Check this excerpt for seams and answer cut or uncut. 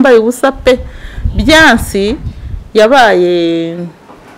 uncut